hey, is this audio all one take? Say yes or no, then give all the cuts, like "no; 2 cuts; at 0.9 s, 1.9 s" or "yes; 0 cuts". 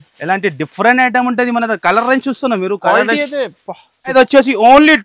no; 1 cut; at 4.1 s